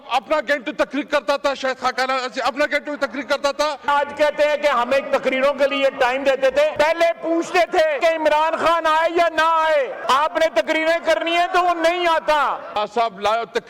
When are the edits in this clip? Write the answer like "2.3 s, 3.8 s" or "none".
3.9 s, 6.7 s, 8.0 s, 10.0 s, 12.8 s